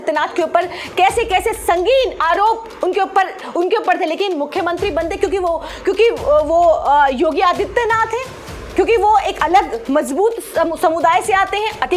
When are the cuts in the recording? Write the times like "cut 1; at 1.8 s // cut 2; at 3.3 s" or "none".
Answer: none